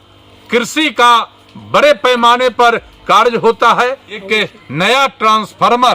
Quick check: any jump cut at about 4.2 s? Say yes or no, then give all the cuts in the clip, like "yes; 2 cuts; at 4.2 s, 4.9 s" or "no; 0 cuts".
yes; 1 cut; at 4.2 s